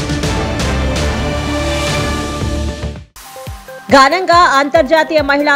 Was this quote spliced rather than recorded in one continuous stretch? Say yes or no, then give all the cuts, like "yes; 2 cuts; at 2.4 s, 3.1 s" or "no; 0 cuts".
yes; 1 cut; at 3.7 s